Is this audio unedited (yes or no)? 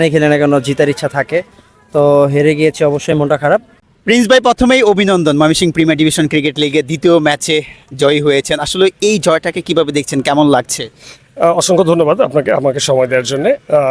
no